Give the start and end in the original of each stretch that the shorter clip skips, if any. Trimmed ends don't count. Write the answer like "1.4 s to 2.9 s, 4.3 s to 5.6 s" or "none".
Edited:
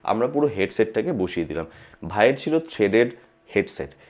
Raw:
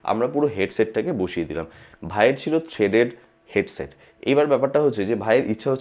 none

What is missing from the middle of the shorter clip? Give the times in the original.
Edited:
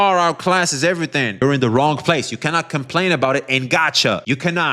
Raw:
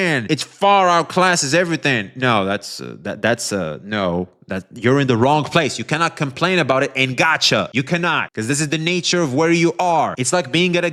2.1 s to 4.9 s

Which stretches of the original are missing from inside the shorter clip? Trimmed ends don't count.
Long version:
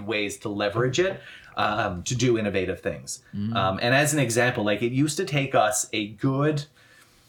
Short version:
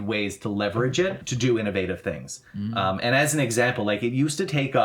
1.3 s to 2.1 s

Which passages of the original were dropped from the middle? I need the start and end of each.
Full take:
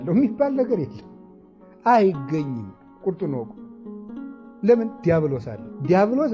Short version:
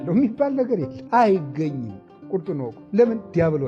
0.9 s to 1.7 s, 3.5 s to 4.5 s

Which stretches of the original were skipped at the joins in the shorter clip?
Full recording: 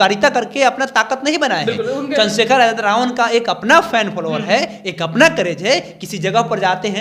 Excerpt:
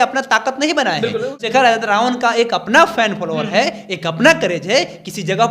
2.1 s to 2.4 s

